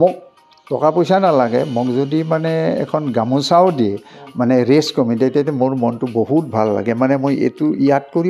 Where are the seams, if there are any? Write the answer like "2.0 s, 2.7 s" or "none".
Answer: none